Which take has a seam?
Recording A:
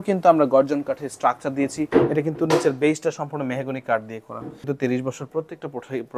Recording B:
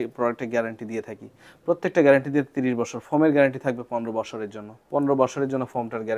A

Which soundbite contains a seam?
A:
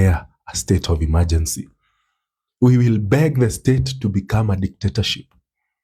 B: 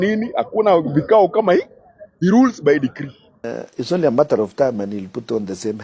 B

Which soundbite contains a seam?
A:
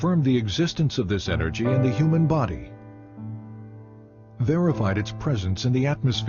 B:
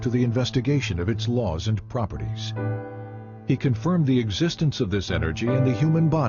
B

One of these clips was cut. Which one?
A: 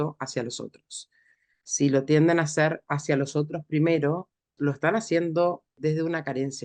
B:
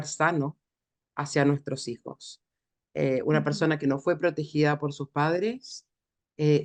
A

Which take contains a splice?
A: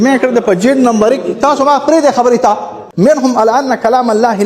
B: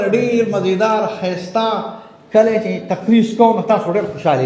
A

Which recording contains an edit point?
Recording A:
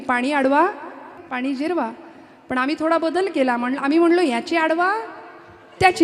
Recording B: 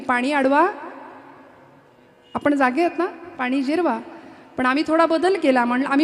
A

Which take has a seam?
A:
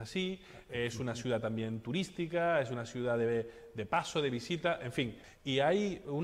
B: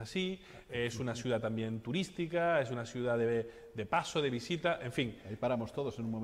A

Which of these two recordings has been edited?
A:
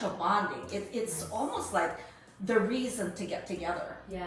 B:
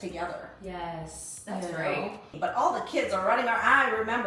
B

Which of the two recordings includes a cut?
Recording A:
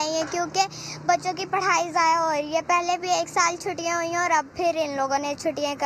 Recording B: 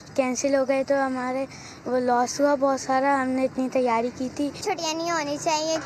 B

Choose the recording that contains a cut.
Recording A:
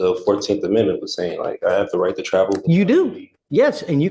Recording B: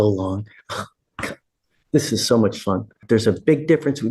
B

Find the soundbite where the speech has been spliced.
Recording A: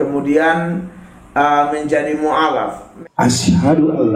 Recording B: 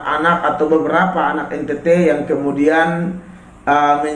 A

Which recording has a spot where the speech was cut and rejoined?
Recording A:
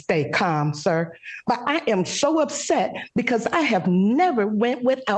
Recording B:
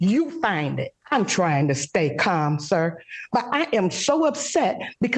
B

